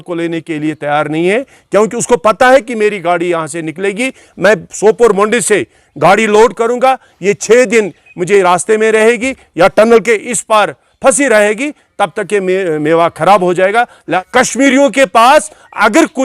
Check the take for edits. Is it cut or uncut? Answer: cut